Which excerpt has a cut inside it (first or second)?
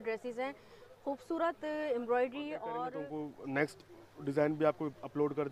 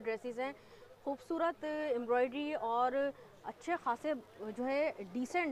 first